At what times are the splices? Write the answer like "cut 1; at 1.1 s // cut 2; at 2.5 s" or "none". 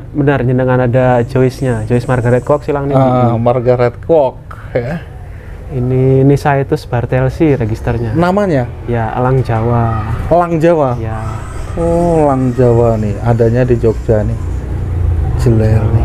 none